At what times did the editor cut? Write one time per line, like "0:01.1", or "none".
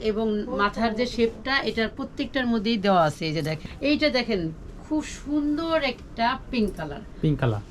0:03.6